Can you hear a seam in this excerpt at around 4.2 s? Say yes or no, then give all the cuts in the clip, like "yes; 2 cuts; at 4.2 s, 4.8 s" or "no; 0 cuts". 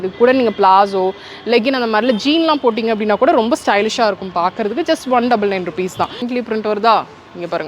no; 1 cut; at 6.3 s